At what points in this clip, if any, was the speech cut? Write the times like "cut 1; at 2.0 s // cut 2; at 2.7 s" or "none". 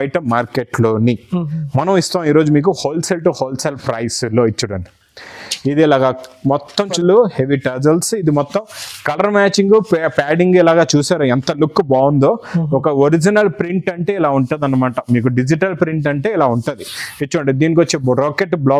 cut 1; at 6.9 s